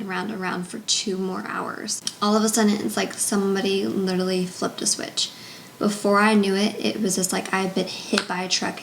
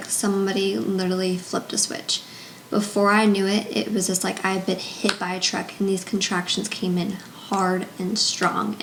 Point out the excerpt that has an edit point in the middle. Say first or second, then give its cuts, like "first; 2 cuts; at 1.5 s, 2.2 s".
first; 1 cut; at 2.1 s